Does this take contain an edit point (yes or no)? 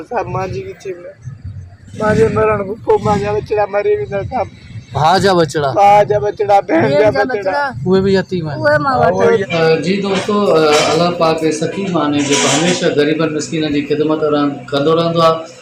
yes